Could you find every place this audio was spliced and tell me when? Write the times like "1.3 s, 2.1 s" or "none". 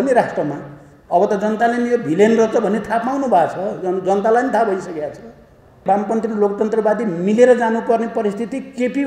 5.8 s